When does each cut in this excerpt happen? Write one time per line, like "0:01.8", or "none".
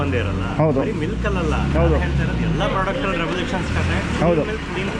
none